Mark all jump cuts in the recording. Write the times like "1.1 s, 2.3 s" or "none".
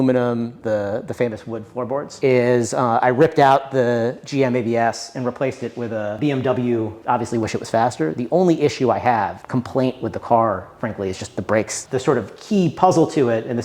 2.1 s, 7.0 s, 11.8 s